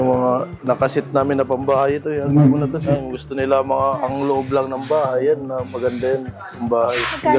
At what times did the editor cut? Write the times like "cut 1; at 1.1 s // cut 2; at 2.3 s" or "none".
none